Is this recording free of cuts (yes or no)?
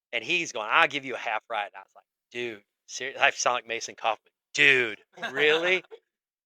yes